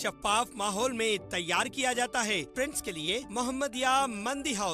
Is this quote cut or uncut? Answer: cut